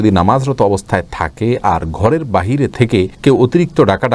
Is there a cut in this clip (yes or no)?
no